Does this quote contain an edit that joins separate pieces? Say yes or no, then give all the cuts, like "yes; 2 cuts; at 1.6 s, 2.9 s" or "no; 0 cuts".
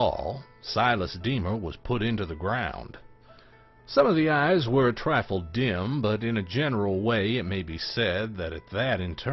yes; 1 cut; at 7.3 s